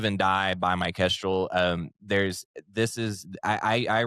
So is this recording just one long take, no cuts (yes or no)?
yes